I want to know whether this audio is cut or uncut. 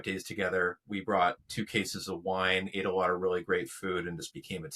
uncut